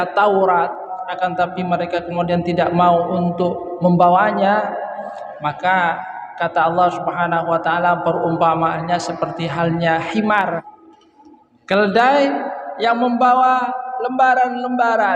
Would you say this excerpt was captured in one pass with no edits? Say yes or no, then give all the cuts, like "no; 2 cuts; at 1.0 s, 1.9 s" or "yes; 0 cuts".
no; 2 cuts; at 0.9 s, 10.6 s